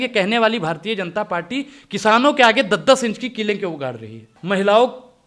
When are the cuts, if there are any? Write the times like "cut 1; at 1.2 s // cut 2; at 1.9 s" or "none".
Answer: cut 1; at 4.3 s